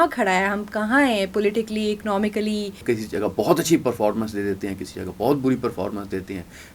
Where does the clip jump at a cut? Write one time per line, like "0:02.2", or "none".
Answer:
0:02.8